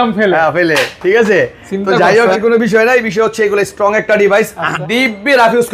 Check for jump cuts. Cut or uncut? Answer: cut